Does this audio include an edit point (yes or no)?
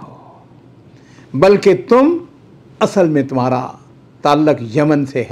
no